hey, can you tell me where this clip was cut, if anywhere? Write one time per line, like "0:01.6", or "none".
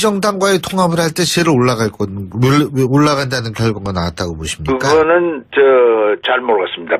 none